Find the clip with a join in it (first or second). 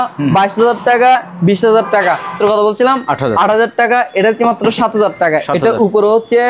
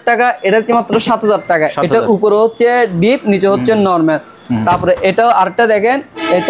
first